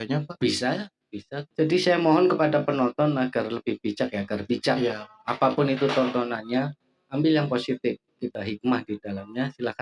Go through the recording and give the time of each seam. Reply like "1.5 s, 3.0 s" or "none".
1.4 s, 8.3 s